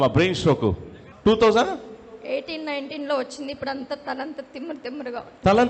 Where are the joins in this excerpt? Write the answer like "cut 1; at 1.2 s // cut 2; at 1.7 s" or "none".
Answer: cut 1; at 1.1 s